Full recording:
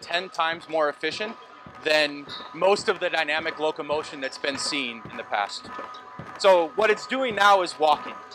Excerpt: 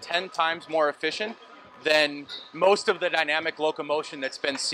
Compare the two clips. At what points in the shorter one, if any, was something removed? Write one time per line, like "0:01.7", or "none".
none